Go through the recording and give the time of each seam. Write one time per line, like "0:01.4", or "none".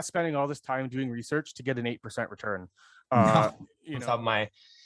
0:03.9